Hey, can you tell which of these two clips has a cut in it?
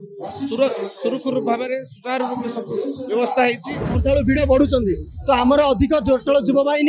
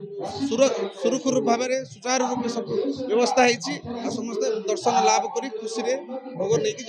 first; 1 cut; at 3.8 s

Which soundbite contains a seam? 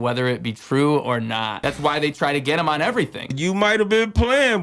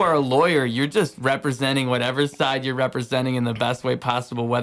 first; 2 cuts; at 1.5 s, 3.3 s

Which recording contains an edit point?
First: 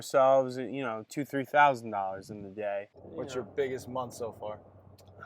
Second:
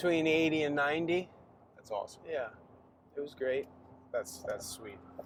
first; 1 cut; at 2.9 s

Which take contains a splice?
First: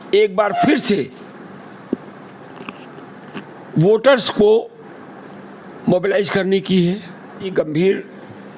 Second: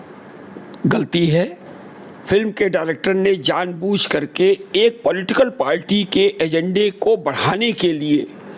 first; 1 cut; at 7.5 s

